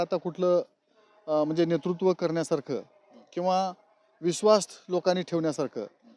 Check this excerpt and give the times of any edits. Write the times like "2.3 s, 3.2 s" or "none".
none